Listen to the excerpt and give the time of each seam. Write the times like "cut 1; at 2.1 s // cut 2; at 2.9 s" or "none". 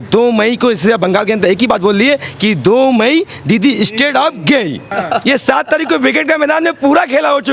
cut 1; at 4.9 s